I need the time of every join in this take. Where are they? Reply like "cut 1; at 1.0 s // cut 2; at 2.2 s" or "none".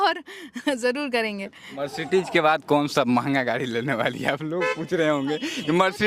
cut 1; at 1.7 s